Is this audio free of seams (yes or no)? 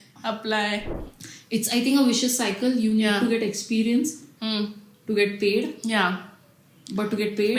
no